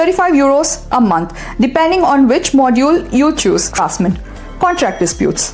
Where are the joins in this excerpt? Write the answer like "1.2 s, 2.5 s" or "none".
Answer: 3.8 s

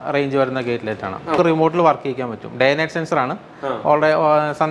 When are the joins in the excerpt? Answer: 1.4 s

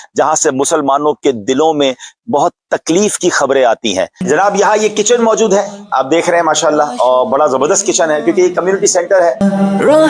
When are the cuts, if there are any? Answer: 4.2 s, 9.4 s

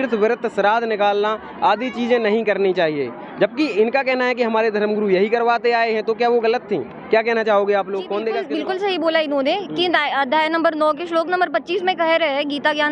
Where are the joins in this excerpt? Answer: 8.5 s

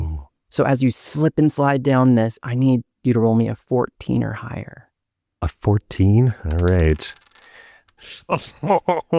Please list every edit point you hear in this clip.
8.1 s

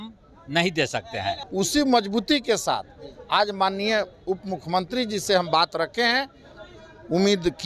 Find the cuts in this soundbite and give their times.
1.4 s

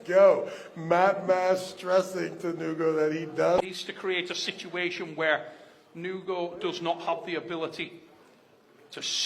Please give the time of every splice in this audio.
3.6 s

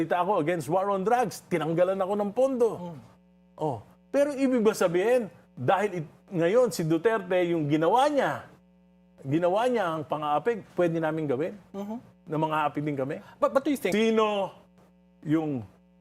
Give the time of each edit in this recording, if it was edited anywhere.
13.9 s

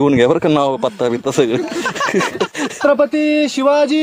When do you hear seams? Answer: 2.7 s

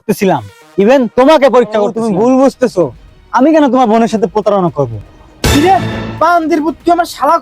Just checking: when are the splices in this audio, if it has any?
2.0 s

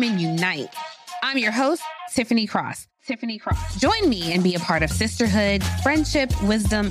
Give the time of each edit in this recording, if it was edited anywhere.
none

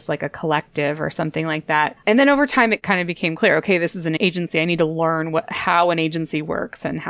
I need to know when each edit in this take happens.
2.0 s, 2.8 s, 4.2 s

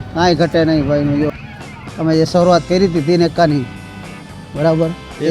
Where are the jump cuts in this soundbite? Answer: 1.4 s

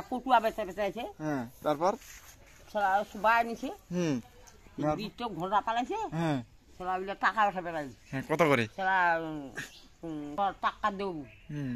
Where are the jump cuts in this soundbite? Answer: 10.3 s

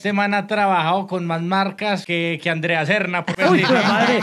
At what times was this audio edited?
2.0 s, 3.4 s

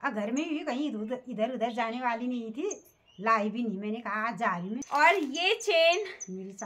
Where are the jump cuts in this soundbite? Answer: 4.8 s

